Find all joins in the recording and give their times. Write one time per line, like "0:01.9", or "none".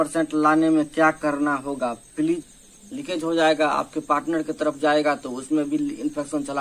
0:02.5